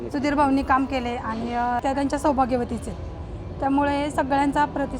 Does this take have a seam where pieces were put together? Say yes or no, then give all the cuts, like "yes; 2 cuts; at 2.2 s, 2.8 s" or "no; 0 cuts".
yes; 1 cut; at 1.8 s